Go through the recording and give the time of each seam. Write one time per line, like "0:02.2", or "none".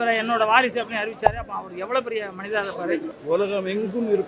0:03.1